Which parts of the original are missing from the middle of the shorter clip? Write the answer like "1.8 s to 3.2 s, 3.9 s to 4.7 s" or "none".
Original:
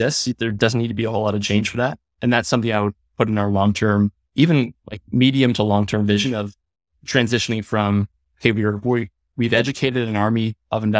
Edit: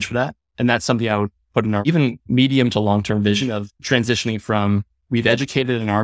3.5 s to 4.7 s, 6.5 s to 7.0 s, 8.2 s to 9.2 s